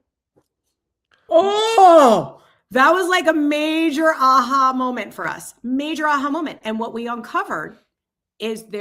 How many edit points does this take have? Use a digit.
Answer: 1